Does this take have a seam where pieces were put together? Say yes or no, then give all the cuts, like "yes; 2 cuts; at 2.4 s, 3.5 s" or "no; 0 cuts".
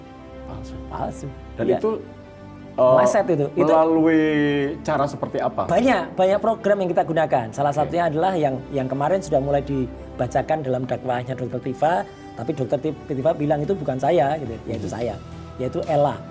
no; 0 cuts